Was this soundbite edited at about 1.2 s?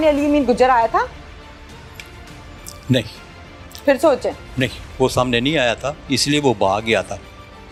no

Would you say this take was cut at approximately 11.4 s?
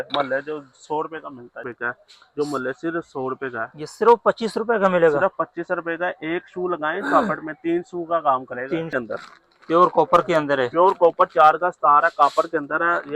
no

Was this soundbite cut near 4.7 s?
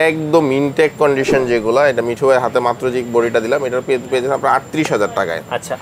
no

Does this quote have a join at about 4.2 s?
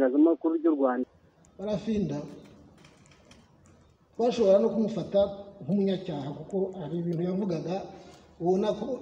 no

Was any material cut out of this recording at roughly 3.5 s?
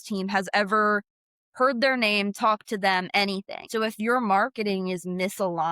yes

